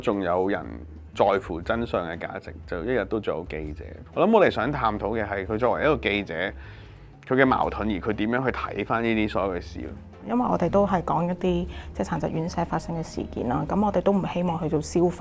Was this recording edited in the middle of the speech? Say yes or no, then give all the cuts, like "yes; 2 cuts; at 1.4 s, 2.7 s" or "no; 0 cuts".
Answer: yes; 2 cuts; at 3.9 s, 10.2 s